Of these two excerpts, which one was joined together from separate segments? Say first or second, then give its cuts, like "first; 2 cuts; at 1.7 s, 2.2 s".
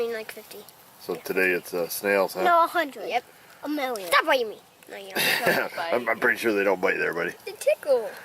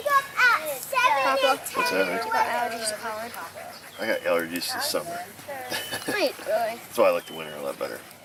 first; 1 cut; at 3.0 s